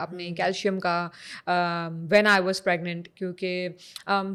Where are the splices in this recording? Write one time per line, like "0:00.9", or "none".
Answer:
none